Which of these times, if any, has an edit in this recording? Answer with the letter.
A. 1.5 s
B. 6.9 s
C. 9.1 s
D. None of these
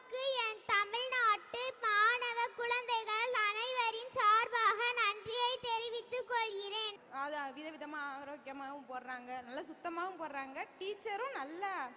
B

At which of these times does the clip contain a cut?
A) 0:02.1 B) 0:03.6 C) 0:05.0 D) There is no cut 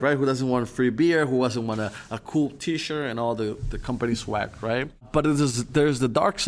D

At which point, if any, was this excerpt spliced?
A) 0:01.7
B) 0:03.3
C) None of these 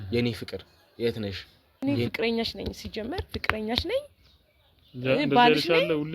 A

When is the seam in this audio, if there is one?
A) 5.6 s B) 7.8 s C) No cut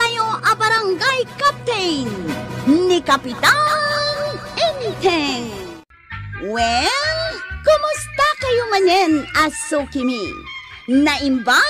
A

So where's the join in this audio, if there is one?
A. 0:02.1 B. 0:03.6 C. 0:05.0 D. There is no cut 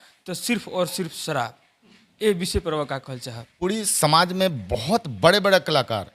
B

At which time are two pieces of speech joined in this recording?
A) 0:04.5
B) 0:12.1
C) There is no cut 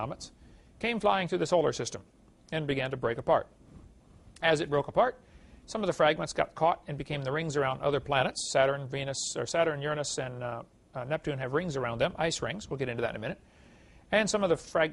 B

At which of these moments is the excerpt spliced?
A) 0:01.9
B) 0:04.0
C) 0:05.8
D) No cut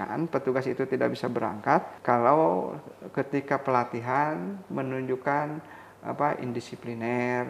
A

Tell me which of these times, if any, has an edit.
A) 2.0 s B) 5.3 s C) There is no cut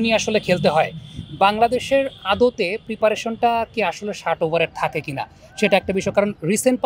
C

